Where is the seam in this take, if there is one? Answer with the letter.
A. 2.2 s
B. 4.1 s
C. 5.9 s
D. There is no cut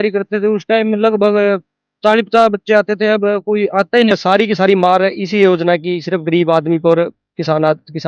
B